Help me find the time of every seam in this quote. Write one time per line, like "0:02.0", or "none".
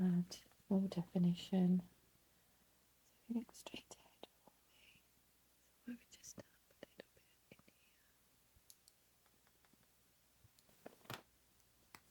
0:10.7